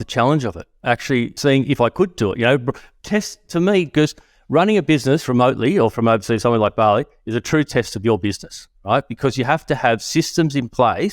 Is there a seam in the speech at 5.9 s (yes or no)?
yes